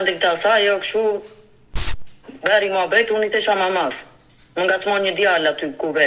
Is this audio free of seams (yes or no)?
yes